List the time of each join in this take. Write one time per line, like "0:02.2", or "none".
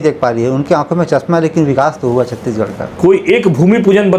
0:02.8